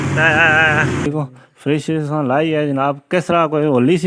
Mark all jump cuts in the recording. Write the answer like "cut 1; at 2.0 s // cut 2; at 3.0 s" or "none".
cut 1; at 1.1 s